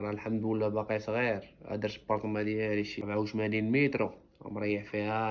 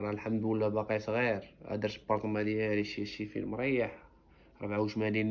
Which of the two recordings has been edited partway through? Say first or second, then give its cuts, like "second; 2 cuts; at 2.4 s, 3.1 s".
first; 1 cut; at 3.0 s